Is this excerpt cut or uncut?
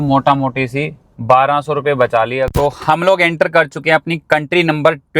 cut